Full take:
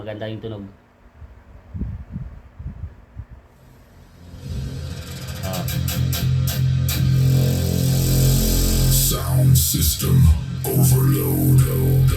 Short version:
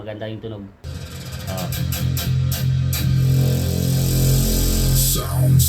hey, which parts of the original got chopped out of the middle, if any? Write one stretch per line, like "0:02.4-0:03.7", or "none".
0:00.9-0:04.9